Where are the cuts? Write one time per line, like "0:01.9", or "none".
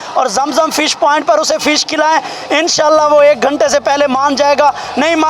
none